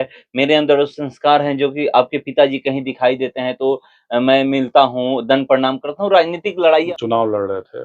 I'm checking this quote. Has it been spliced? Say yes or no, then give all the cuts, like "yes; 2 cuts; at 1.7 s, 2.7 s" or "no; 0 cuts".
yes; 1 cut; at 6.8 s